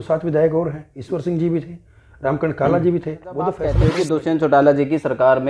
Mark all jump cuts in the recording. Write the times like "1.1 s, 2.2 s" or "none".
3.8 s